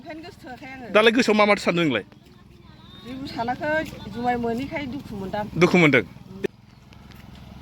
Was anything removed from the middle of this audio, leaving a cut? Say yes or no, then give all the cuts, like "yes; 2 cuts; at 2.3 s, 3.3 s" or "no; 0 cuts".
yes; 1 cut; at 6.4 s